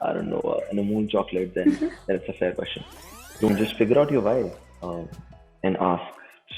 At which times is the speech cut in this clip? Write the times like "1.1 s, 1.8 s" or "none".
3.5 s